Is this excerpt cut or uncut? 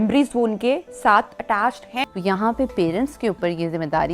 cut